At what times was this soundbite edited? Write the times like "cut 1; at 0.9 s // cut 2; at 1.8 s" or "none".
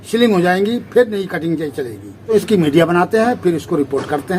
cut 1; at 2.1 s